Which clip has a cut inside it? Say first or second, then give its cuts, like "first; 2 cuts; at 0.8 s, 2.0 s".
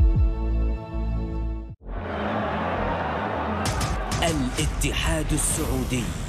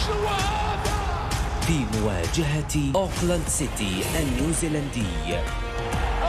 first; 1 cut; at 1.4 s